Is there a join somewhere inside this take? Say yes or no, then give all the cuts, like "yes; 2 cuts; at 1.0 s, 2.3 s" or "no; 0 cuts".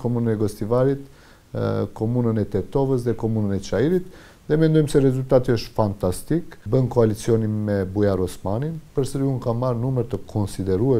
yes; 1 cut; at 6.6 s